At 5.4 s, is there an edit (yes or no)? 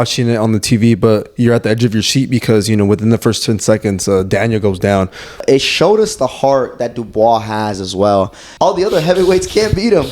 yes